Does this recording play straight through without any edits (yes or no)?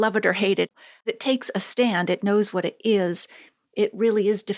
no